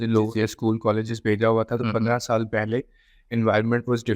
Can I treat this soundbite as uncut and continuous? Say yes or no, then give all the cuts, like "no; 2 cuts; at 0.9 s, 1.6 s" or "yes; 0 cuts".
yes; 0 cuts